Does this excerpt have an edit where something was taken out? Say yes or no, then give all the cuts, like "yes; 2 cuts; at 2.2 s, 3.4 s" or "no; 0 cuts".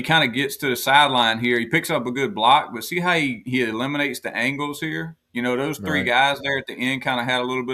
no; 0 cuts